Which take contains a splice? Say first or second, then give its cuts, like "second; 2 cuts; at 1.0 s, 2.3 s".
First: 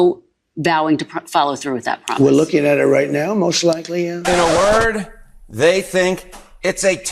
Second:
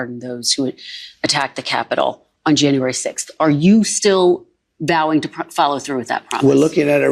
first; 1 cut; at 4.2 s